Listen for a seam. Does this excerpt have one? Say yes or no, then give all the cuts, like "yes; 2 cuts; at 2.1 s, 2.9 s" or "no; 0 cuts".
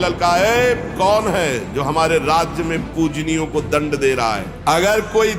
yes; 1 cut; at 4.5 s